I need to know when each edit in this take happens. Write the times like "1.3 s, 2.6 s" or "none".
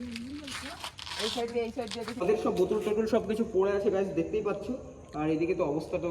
2.2 s